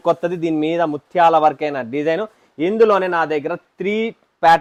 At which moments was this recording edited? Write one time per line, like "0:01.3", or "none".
none